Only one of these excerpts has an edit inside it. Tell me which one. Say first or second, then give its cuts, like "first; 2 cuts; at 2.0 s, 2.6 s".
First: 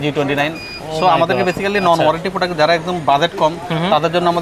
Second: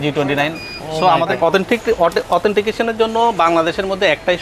second; 1 cut; at 1.4 s